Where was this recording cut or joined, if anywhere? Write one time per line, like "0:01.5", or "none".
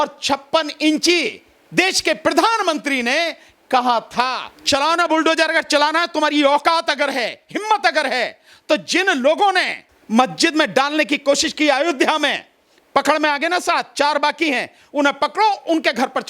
0:04.5

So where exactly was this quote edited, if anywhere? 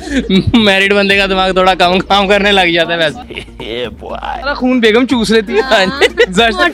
none

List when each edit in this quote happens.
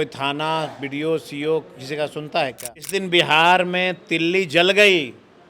0:02.9

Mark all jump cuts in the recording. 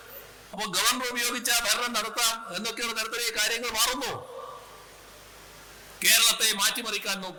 none

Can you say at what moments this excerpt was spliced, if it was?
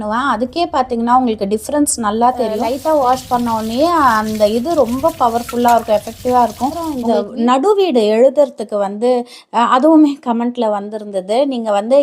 0:02.7
0:07.0

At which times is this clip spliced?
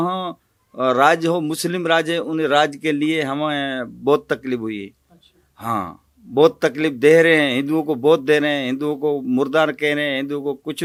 none

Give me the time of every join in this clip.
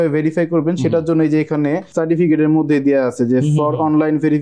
0:01.9

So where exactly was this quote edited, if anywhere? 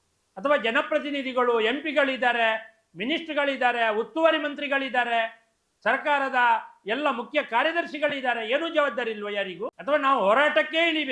0:09.7

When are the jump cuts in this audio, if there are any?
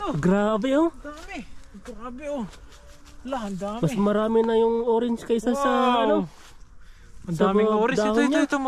none

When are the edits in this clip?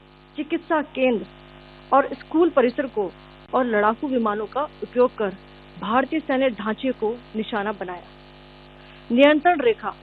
0:03.5

